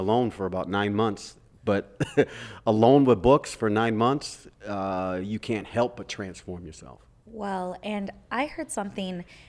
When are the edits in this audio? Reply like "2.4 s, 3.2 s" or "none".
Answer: none